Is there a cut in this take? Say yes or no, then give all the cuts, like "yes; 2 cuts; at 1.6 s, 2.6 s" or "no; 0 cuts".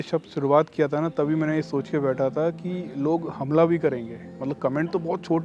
no; 0 cuts